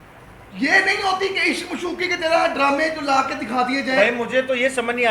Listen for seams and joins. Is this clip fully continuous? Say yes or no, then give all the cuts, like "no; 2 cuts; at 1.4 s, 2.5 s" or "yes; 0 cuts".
yes; 0 cuts